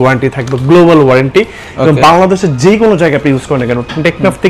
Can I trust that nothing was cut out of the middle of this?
yes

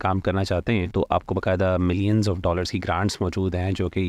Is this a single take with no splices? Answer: no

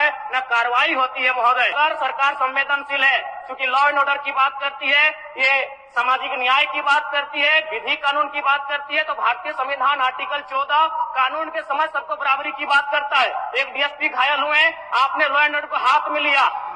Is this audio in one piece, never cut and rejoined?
no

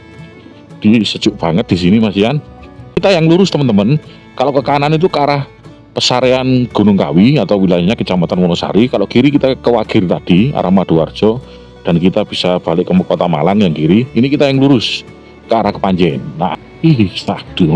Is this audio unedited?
no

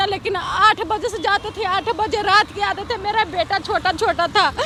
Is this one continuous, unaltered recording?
yes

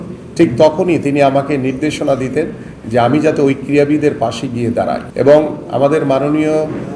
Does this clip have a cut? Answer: yes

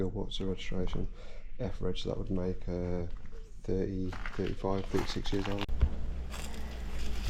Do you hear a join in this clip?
yes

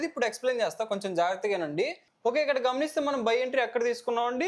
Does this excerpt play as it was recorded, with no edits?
no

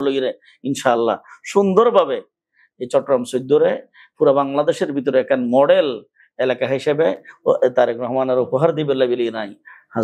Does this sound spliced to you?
no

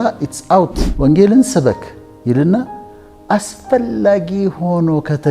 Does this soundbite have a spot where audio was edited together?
yes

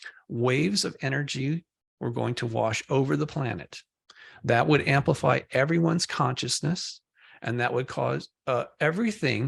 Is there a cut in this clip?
no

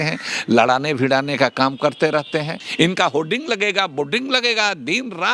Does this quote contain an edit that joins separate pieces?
yes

